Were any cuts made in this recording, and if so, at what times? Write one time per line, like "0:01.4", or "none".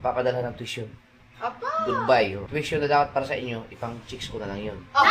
0:02.4